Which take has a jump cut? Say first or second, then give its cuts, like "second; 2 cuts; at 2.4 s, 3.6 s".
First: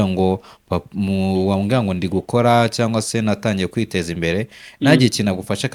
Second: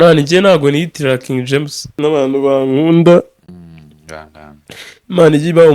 second; 1 cut; at 1.8 s